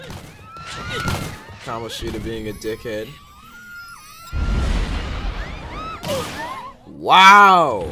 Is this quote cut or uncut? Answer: uncut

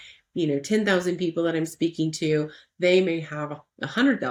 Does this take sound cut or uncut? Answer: uncut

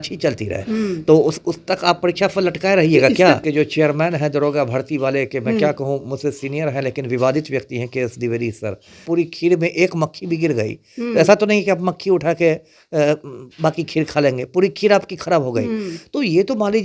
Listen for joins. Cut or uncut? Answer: cut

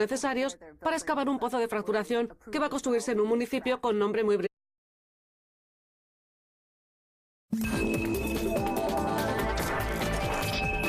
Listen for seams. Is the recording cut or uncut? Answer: uncut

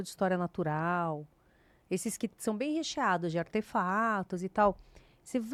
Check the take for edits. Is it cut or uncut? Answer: uncut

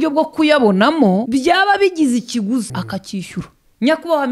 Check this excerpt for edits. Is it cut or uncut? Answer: cut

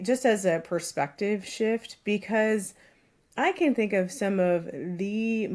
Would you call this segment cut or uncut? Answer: uncut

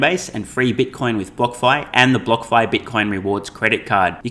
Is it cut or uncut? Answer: uncut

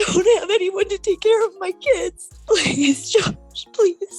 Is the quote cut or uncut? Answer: cut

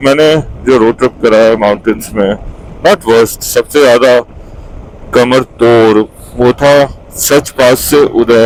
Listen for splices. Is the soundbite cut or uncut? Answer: uncut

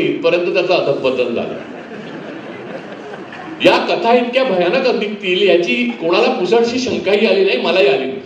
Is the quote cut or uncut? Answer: uncut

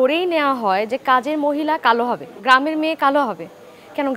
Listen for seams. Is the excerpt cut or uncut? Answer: cut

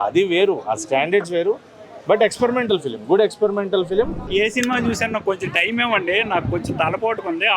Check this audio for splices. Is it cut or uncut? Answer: cut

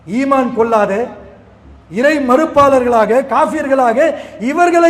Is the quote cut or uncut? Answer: uncut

